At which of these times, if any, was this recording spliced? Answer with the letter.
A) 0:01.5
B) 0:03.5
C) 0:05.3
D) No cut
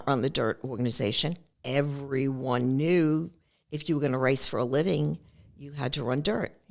A